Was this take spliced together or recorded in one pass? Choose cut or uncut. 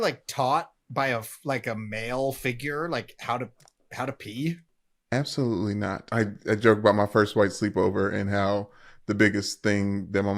cut